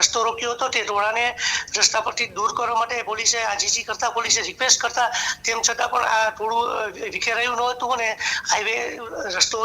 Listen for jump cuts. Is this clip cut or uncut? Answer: uncut